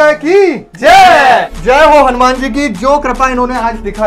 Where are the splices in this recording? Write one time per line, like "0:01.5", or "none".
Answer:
0:01.5